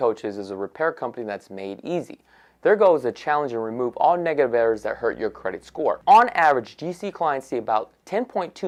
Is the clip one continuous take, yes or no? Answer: yes